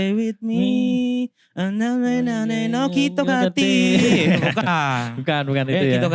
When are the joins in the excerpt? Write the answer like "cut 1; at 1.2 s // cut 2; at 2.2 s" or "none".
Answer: none